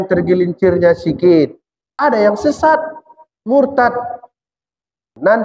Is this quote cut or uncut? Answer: cut